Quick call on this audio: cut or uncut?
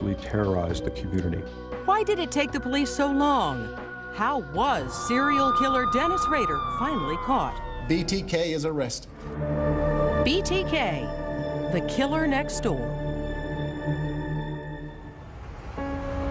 uncut